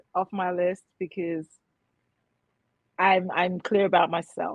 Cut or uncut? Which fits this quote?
uncut